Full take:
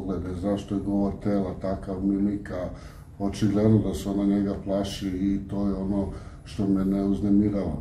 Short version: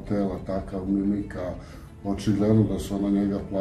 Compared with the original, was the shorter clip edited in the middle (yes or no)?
no